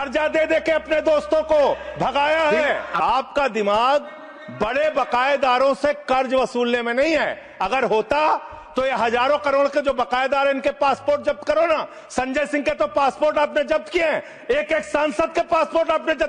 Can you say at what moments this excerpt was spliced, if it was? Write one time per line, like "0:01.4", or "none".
none